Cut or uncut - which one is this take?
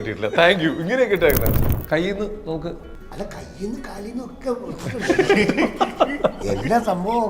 cut